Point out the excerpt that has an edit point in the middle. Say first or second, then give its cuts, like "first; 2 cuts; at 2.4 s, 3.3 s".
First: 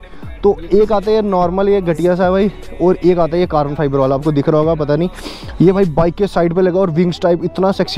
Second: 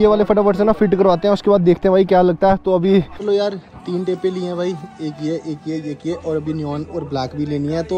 second; 1 cut; at 3.2 s